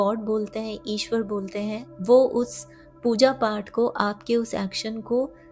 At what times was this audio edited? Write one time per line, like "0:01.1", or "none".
none